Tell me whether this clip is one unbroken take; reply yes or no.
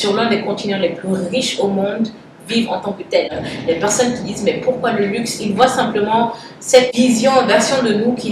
no